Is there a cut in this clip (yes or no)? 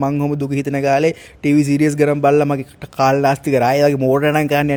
no